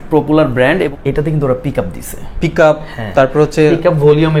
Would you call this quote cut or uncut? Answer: cut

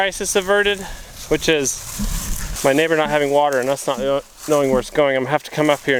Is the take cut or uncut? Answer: uncut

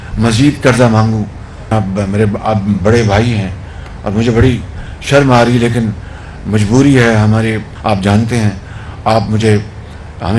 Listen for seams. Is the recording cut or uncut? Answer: cut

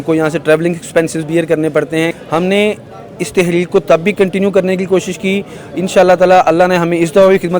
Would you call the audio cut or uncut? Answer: cut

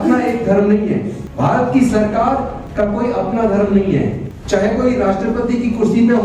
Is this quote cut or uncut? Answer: cut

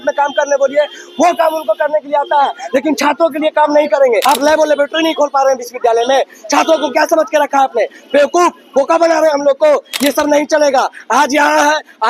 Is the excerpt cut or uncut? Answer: cut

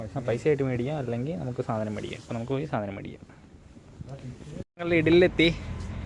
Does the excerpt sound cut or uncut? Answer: cut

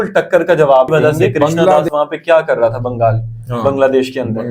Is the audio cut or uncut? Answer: cut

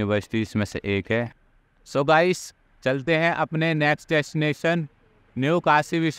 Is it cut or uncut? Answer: cut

